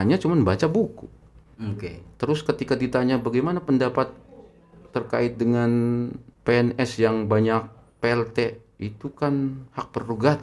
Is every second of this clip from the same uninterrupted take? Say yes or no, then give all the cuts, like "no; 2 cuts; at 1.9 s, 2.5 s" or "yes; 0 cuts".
no; 1 cut; at 6.2 s